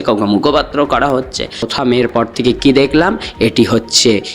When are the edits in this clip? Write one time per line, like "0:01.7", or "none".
0:01.7